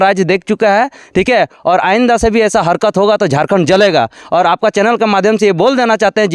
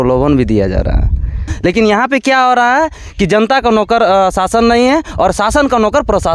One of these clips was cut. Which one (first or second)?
second